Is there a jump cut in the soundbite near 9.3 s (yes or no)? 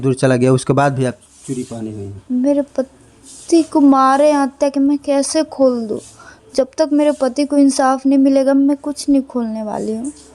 no